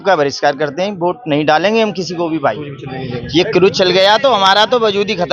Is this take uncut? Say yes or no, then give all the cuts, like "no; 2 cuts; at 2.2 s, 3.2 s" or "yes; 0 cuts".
yes; 0 cuts